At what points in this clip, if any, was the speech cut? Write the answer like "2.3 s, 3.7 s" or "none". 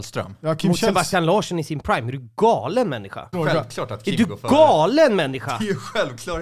3.3 s